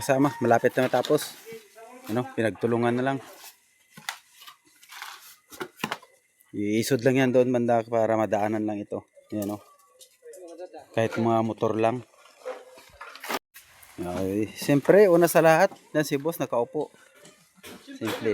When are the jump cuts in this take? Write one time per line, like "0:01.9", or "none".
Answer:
0:13.4